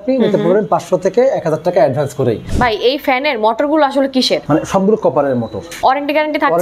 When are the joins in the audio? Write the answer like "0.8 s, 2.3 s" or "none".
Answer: 2.5 s, 4.4 s, 5.6 s